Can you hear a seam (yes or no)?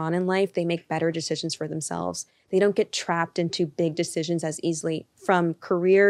no